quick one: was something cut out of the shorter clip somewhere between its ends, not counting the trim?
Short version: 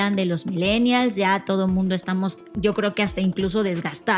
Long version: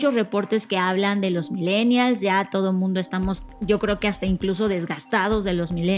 no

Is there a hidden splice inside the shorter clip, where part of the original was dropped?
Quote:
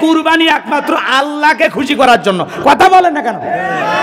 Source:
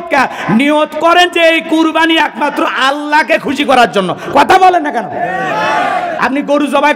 no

